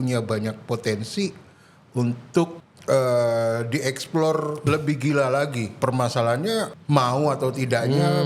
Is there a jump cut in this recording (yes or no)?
yes